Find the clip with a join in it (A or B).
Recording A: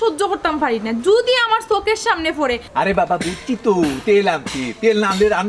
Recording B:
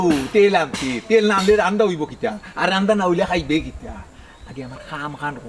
A